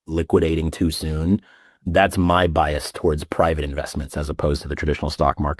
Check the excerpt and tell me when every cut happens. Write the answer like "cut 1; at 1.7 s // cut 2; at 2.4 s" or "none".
cut 1; at 1.7 s

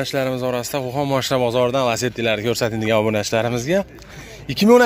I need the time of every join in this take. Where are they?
none

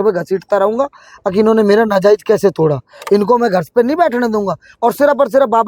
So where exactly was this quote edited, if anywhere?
none

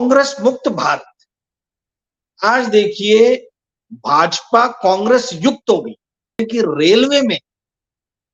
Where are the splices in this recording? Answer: cut 1; at 6.4 s

